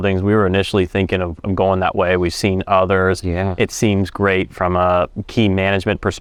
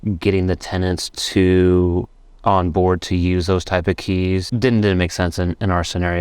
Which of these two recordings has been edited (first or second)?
second